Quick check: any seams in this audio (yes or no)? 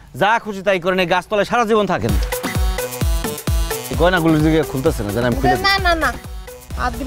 yes